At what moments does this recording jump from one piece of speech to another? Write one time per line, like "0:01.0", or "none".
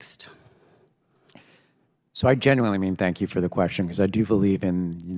none

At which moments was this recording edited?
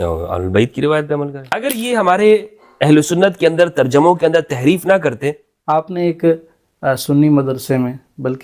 0:01.5
0:05.5

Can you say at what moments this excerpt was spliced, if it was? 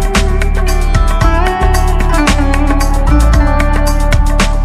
none

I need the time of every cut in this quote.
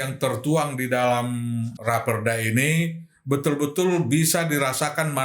0:01.7

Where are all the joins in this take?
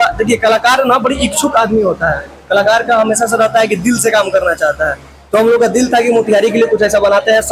none

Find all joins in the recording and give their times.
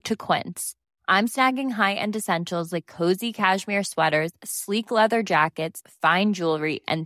none

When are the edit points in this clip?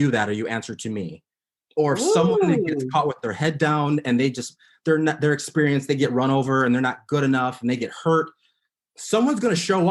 none

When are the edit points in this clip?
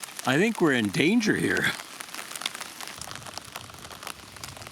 0:03.0

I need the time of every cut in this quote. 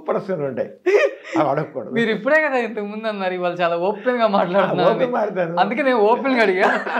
none

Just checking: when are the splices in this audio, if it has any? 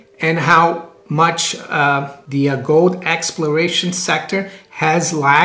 0:00.9
0:02.2

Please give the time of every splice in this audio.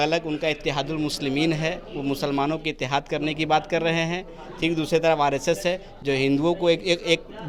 none

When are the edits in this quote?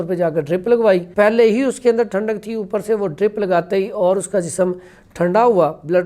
0:01.1

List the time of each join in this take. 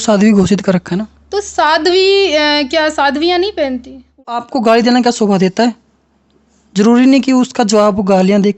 0:04.4

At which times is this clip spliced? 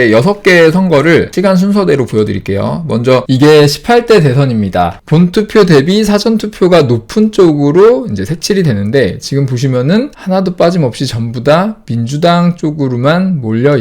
0:03.2
0:05.0
0:10.2

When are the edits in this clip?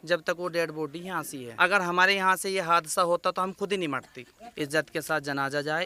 0:01.4
0:04.4

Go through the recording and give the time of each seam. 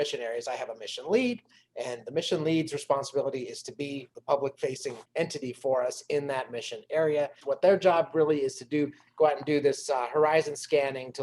0:04.1
0:05.0
0:07.4

